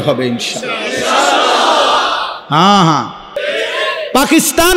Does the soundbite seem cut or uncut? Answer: cut